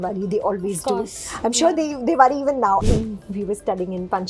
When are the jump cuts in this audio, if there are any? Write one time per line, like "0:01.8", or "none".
0:02.8